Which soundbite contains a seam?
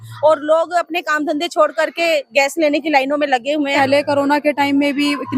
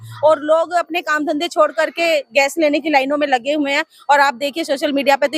first; 1 cut; at 3.7 s

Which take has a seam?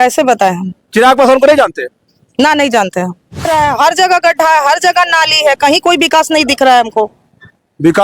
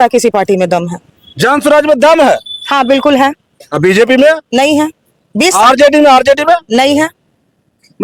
first; 1 cut; at 3.4 s

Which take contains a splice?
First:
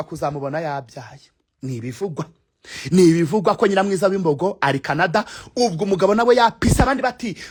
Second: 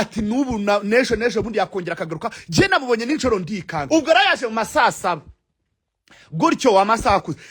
second; 1 cut; at 3.8 s

